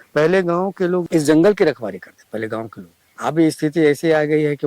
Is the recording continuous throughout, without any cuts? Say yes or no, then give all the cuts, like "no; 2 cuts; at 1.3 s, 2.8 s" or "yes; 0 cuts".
no; 2 cuts; at 1.1 s, 2.1 s